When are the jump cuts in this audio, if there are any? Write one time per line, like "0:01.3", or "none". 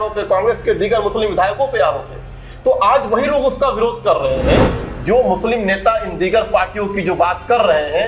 0:04.9